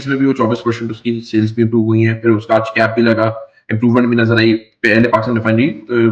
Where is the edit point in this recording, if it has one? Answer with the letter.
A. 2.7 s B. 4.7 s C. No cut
C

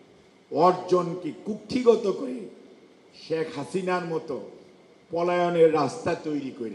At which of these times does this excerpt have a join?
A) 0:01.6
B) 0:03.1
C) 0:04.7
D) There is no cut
D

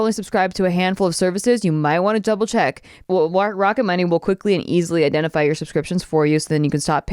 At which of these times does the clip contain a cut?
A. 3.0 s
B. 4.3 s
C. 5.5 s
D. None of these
A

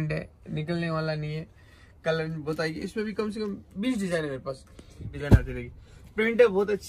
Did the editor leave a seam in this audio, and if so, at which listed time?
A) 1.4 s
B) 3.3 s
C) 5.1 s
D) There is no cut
C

